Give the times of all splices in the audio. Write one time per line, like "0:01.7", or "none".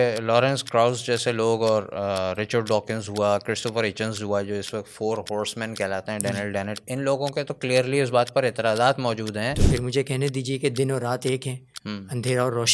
0:09.6